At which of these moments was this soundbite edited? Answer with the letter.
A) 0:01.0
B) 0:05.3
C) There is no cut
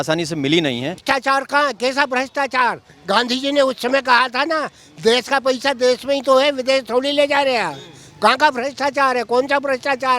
A